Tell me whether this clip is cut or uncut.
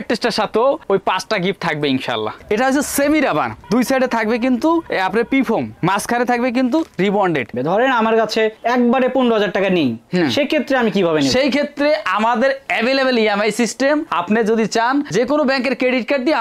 cut